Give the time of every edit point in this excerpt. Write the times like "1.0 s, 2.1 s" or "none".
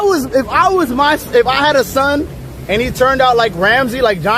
none